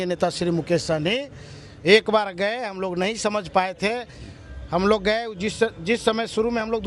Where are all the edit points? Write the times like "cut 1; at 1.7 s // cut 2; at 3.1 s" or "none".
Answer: none